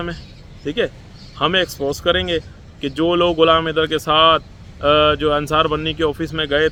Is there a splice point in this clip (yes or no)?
no